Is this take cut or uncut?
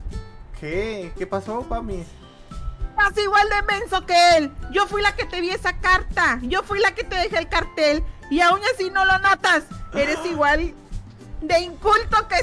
uncut